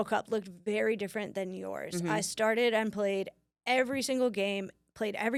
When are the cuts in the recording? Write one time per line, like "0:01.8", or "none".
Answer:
none

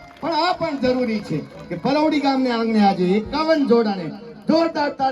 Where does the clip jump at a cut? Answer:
none

